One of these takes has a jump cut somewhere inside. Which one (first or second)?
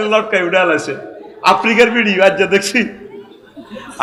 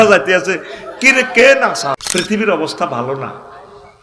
second